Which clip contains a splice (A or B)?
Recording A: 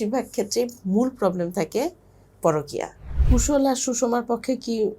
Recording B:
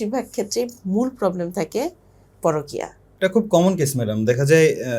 A